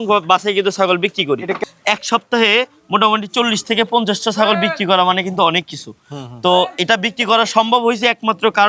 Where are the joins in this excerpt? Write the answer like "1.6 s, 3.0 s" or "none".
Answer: 1.5 s